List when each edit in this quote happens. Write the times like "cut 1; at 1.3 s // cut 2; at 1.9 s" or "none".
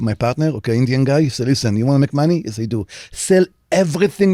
none